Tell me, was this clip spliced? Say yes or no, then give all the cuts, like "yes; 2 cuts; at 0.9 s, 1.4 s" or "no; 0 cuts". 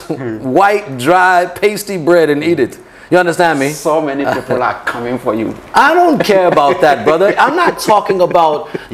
no; 0 cuts